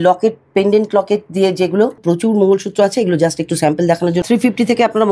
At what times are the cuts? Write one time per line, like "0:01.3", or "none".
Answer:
0:02.0
0:04.2